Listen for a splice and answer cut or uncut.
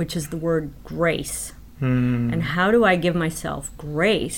uncut